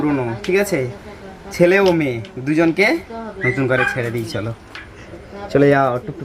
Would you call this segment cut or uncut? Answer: uncut